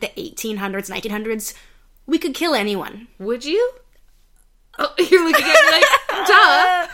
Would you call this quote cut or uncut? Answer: uncut